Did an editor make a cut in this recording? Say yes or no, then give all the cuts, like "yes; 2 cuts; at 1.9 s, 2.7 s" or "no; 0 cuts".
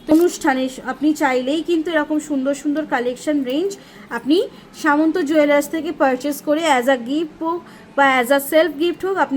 no; 0 cuts